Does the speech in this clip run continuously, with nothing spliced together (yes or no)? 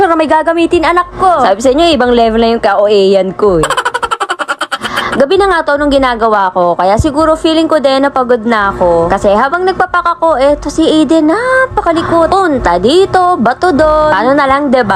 yes